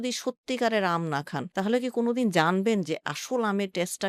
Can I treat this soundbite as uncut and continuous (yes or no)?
yes